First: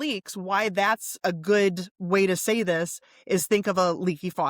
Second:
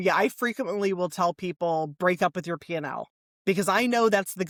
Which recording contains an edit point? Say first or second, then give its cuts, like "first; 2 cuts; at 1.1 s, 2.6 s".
first; 1 cut; at 1.2 s